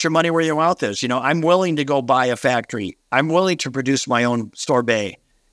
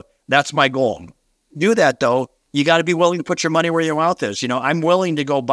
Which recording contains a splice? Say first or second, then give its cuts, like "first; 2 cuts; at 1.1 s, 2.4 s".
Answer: second; 2 cuts; at 1.3 s, 2.4 s